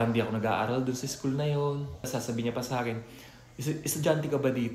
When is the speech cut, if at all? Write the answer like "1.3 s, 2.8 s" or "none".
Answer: 2.1 s